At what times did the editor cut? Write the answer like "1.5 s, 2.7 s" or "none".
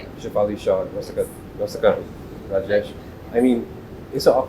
none